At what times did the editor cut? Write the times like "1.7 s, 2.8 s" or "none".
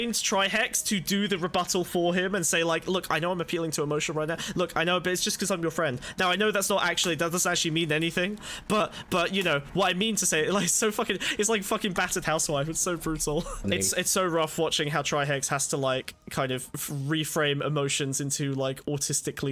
13.6 s